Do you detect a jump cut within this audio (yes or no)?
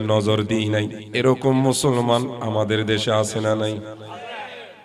yes